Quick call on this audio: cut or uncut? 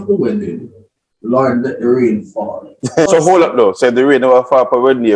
cut